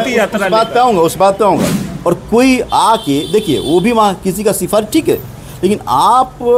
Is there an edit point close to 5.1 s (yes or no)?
no